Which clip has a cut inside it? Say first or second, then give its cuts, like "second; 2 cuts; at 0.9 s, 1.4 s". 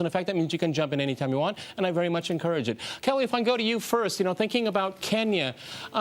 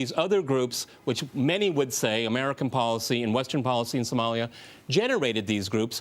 second; 1 cut; at 4.0 s